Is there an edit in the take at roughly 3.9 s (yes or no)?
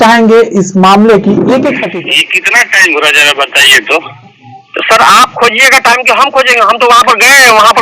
no